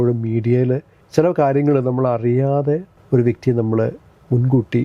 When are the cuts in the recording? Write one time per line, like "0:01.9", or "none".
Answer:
0:01.0
0:02.9